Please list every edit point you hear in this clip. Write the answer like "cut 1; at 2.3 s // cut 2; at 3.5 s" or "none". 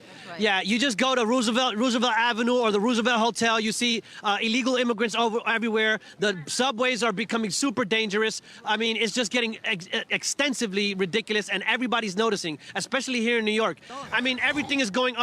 cut 1; at 13.9 s

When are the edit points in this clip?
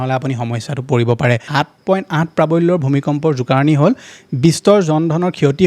cut 1; at 1.5 s

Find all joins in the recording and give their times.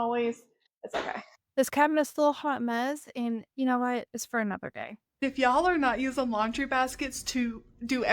cut 1; at 1.2 s // cut 2; at 5.1 s

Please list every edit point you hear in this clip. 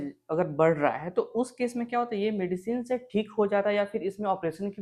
none

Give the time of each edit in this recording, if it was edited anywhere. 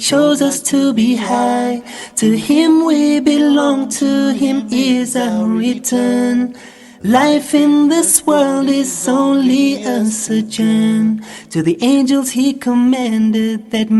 cut 1; at 1.4 s

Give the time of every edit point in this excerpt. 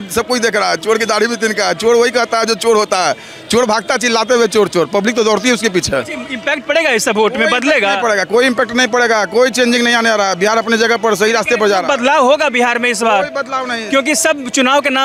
none

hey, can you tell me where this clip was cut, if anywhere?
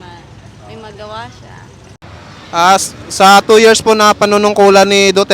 cut 1; at 2.0 s

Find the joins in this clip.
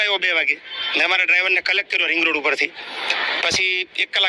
none

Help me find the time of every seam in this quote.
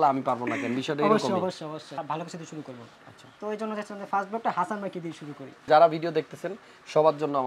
cut 1; at 1.9 s // cut 2; at 5.6 s

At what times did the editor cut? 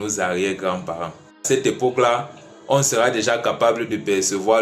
cut 1; at 1.4 s

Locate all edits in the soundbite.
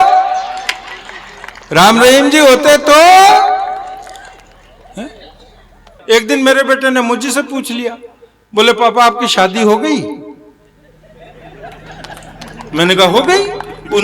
cut 1; at 5.9 s

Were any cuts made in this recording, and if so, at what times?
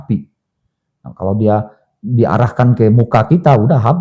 none

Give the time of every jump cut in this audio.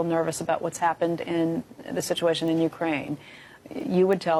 none

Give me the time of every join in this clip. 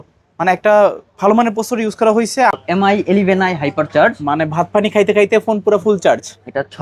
cut 1; at 2.5 s

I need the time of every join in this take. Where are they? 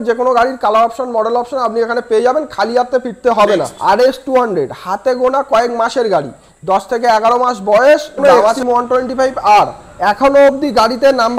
cut 1; at 3.7 s // cut 2; at 8.2 s

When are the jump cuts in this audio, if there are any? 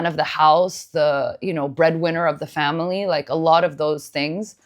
none

